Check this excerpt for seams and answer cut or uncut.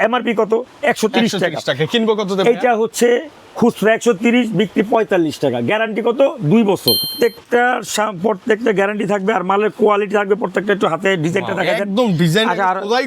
cut